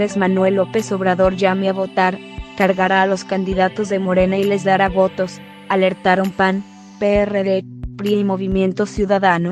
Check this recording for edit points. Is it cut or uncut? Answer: uncut